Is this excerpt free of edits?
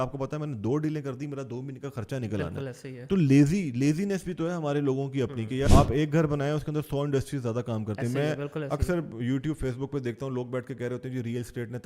no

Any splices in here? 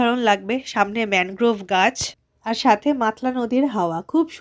no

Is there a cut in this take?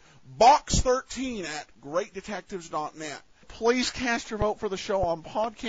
yes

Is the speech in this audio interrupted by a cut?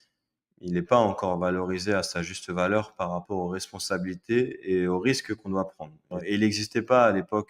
yes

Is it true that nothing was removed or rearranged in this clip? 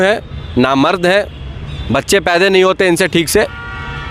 yes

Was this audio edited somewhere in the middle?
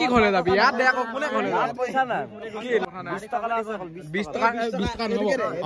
yes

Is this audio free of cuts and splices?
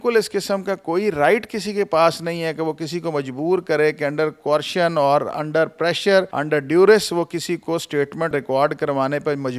no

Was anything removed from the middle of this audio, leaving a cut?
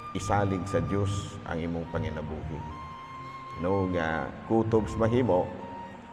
no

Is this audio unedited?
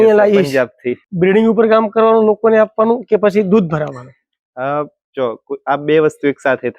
no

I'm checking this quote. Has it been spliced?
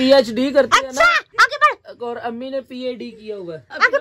no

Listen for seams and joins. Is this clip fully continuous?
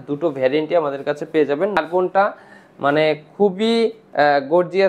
no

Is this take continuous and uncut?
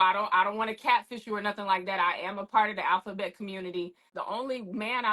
no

